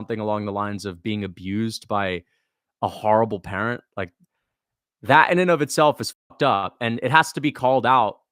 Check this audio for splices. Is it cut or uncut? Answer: uncut